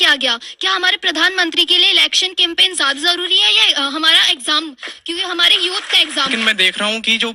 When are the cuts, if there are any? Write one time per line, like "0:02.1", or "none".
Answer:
0:06.3